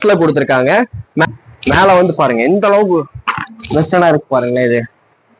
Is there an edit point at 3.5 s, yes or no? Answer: no